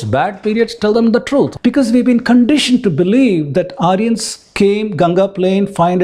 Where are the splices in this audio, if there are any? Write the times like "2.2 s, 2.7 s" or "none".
1.5 s